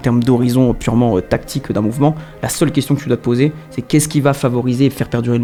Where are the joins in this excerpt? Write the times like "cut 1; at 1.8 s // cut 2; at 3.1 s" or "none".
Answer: none